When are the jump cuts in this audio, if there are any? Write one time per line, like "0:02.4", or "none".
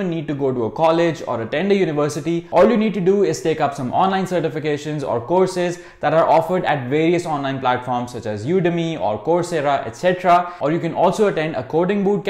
none